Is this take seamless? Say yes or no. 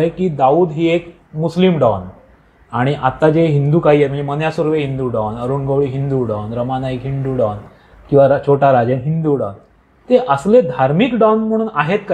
yes